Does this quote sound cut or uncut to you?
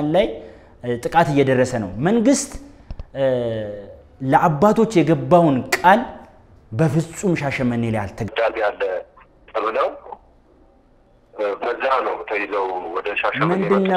cut